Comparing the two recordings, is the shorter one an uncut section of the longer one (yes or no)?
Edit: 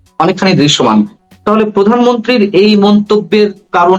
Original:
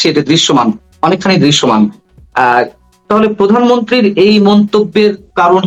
no